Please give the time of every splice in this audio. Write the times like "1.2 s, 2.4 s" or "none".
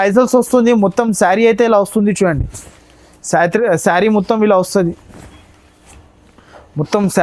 none